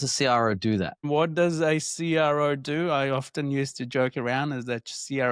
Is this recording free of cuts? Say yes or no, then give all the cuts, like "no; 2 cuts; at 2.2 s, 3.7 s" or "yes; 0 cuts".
no; 1 cut; at 1.0 s